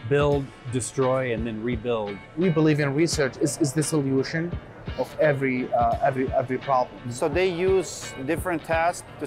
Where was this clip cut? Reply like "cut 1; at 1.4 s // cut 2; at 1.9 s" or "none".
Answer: cut 1; at 2.3 s // cut 2; at 7.1 s